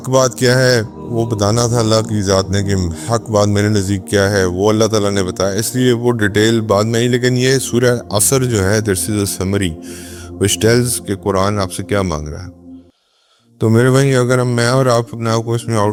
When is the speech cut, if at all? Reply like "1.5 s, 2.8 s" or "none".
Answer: none